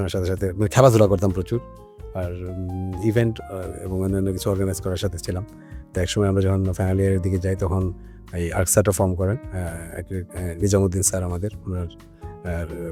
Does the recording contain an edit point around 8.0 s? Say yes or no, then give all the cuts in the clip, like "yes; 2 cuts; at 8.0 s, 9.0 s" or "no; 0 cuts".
no; 0 cuts